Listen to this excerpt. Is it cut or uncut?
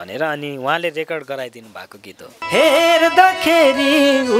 cut